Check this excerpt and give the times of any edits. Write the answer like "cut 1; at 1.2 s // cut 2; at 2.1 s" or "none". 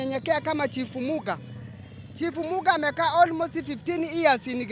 none